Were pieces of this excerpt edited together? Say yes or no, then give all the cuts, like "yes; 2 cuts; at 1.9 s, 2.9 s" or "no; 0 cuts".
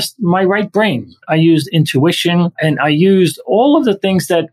yes; 2 cuts; at 1.2 s, 2.6 s